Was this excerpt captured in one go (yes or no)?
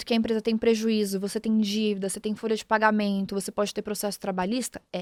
yes